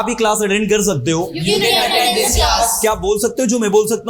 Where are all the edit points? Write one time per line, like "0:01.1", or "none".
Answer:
none